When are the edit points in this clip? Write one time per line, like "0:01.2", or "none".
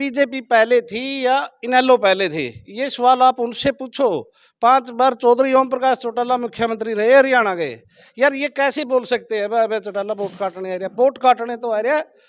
none